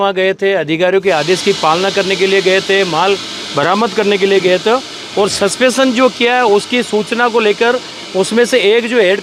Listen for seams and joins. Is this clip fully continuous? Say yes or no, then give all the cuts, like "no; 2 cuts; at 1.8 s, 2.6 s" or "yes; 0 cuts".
yes; 0 cuts